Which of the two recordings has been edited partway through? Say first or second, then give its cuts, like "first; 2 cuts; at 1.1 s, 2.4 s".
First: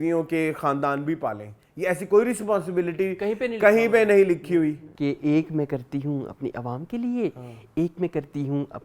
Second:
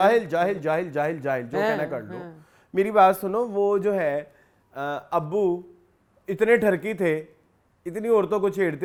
first; 1 cut; at 4.9 s